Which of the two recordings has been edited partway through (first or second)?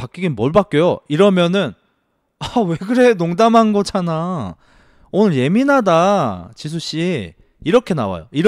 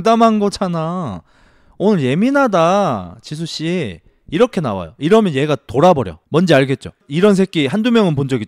second